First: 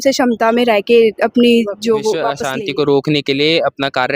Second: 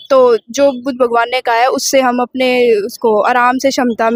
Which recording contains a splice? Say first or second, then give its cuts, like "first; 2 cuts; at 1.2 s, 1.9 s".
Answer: first; 1 cut; at 2.4 s